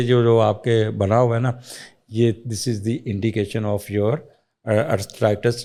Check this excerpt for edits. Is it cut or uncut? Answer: uncut